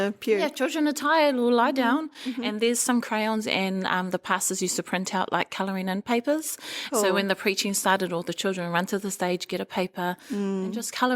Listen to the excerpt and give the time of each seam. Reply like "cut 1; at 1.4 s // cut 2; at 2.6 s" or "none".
none